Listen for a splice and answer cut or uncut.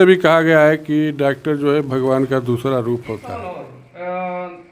cut